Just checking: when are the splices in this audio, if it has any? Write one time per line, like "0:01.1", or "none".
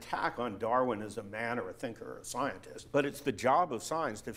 0:02.7